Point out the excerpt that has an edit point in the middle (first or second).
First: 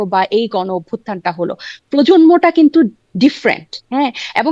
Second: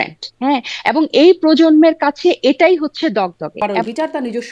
second